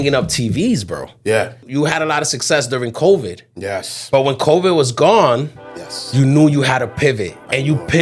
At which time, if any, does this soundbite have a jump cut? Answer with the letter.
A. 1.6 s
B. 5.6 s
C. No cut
A